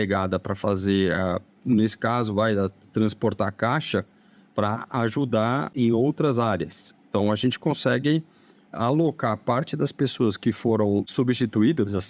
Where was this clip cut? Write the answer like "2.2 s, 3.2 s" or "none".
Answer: 5.7 s, 11.1 s